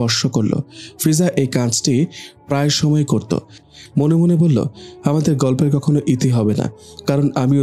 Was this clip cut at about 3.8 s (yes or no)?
yes